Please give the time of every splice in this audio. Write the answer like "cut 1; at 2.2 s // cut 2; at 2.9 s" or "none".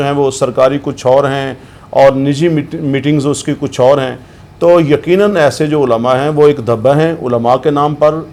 none